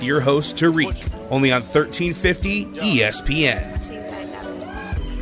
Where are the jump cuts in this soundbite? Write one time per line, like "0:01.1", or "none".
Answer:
none